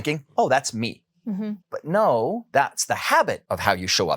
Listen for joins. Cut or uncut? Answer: cut